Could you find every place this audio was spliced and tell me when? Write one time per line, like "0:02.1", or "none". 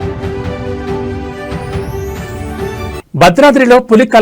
0:01.7